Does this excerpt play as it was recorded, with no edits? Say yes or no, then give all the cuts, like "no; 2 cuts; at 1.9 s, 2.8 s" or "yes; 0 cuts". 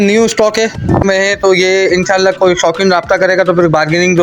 no; 1 cut; at 1.0 s